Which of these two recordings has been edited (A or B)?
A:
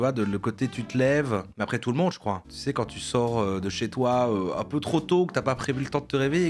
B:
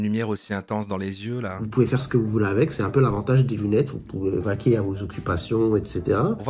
B